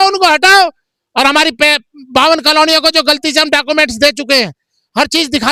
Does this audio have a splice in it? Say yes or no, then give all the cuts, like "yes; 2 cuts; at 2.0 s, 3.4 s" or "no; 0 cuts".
no; 0 cuts